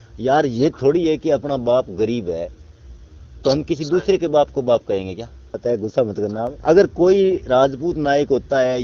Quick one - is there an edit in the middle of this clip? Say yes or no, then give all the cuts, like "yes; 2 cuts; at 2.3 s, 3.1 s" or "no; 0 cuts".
yes; 2 cuts; at 5.6 s, 6.5 s